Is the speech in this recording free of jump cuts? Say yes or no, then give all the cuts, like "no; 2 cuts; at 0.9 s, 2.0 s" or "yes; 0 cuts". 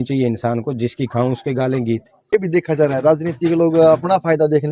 no; 1 cut; at 2.1 s